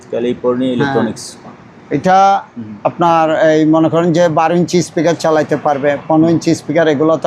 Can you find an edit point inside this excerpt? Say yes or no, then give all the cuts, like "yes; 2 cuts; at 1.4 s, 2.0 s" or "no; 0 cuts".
no; 0 cuts